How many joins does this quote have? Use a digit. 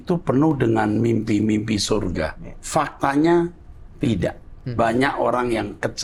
0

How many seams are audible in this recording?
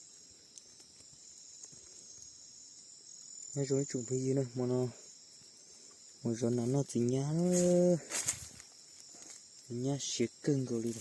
0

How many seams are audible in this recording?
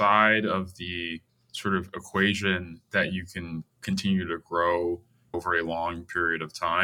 1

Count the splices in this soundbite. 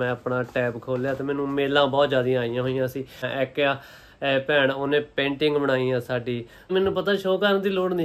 2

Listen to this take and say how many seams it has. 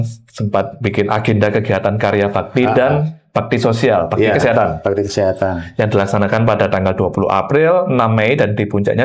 0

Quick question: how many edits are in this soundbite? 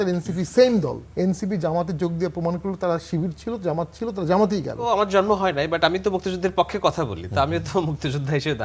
2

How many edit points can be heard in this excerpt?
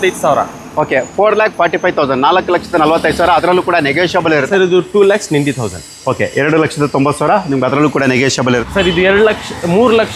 2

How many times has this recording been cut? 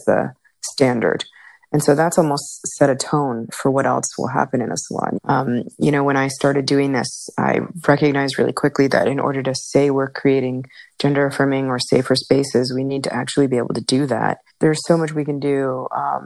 3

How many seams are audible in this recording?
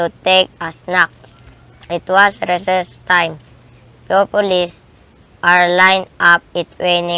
1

